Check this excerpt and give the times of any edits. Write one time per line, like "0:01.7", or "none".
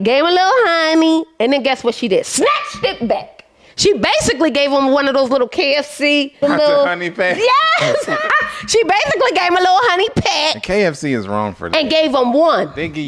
0:06.4